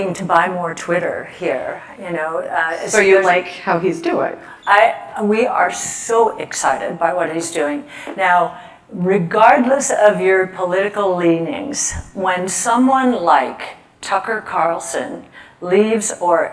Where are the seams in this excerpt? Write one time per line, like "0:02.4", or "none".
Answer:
none